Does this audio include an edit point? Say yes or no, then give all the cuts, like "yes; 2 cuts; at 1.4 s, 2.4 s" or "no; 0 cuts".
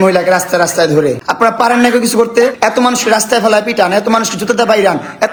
no; 0 cuts